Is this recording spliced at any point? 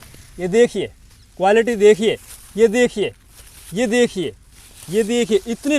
no; 0 cuts

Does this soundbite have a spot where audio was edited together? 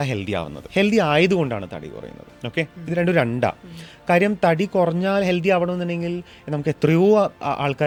no; 0 cuts

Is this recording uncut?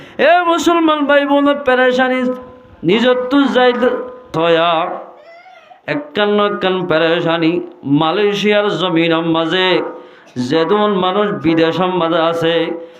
no; 1 cut; at 4.3 s

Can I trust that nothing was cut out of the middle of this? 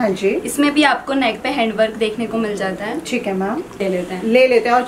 no; 1 cut; at 3.8 s

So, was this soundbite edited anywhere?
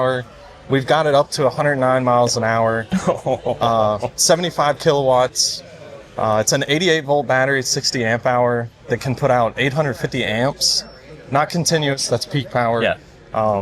no; 0 cuts

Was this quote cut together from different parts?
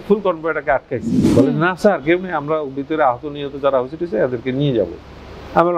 yes; 1 cut; at 1.2 s

